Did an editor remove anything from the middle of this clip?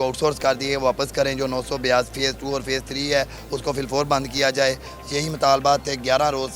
no; 0 cuts

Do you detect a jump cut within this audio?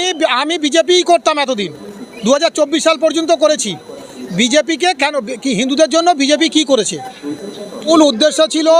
yes; 1 cut; at 7.9 s

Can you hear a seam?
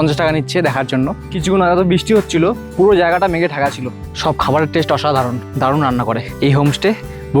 yes; 4 cuts; at 1.2 s, 4.1 s, 5.4 s, 6.3 s

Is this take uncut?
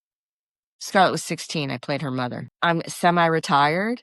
no; 1 cut; at 2.5 s

